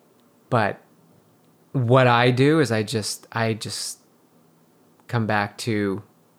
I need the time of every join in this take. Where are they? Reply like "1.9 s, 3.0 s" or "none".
none